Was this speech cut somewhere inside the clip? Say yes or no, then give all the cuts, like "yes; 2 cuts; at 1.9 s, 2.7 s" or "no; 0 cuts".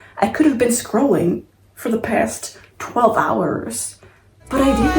no; 0 cuts